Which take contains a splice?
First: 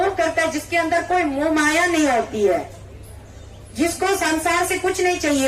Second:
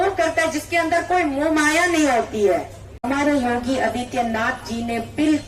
second; 1 cut; at 2.9 s

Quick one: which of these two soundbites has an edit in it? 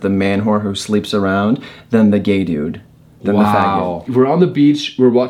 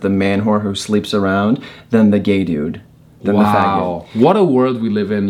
first; 1 cut; at 4.1 s

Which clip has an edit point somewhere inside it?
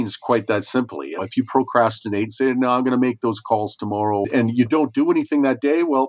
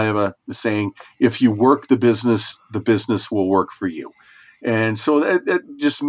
first; 2 cuts; at 1.1 s, 4.3 s

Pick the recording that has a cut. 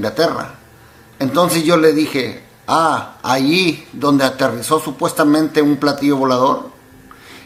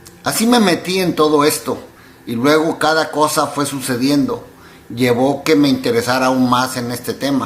second; 1 cut; at 4.0 s

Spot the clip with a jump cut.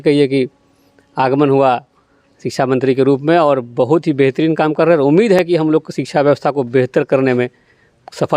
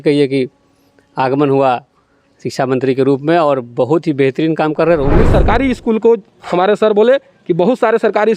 second; 1 cut; at 5.2 s

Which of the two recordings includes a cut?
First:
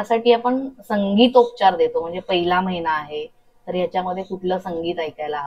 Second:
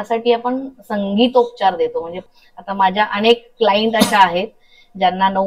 second; 1 cut; at 2.2 s

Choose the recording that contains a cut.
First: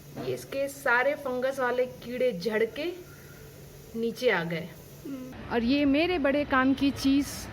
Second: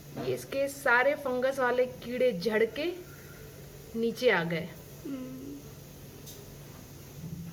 first; 1 cut; at 5.3 s

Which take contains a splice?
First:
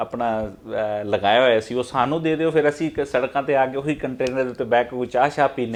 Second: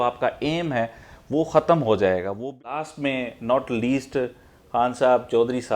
second; 1 cut; at 2.8 s

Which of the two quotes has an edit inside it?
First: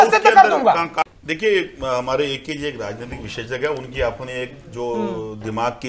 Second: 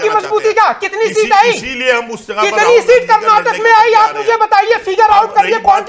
first; 1 cut; at 1.0 s

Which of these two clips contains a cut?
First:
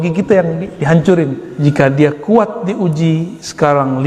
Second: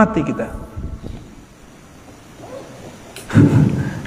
first; 1 cut; at 1.5 s

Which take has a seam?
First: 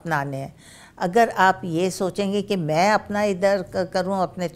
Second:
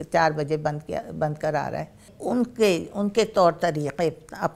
second; 1 cut; at 2.1 s

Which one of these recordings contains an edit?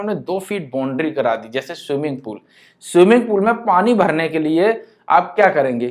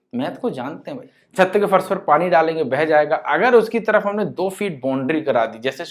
second; 1 cut; at 1.1 s

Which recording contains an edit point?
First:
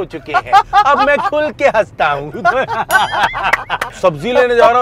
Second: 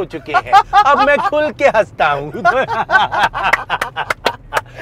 first; 1 cut; at 3.9 s

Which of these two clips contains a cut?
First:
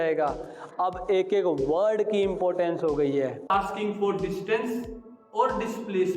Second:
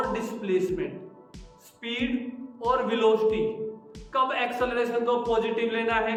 first; 1 cut; at 3.5 s

